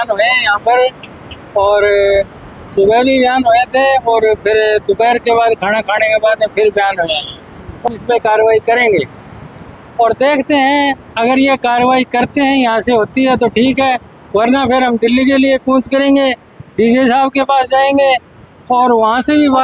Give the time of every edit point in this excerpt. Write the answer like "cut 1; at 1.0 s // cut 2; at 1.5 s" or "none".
none